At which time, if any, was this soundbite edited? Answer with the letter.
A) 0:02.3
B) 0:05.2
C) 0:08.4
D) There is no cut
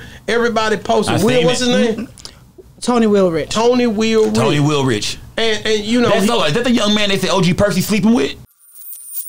C